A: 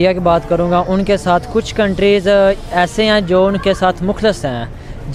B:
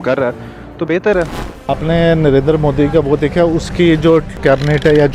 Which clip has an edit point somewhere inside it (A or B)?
B